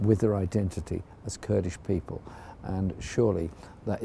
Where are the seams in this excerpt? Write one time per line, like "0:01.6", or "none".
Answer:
none